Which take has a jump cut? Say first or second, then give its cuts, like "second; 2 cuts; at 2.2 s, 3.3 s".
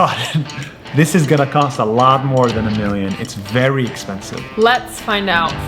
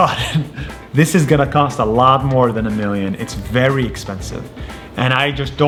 first; 1 cut; at 4.5 s